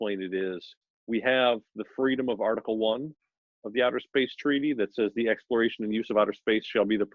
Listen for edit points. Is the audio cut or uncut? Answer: uncut